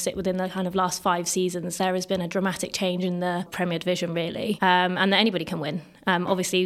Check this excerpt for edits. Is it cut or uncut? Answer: cut